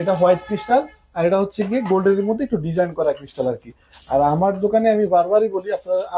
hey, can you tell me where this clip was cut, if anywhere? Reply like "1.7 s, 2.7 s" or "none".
none